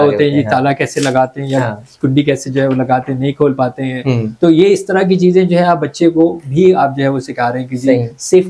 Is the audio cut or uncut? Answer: uncut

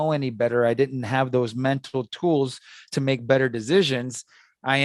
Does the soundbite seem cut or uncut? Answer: uncut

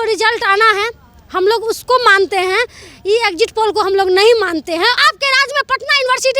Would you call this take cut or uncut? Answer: cut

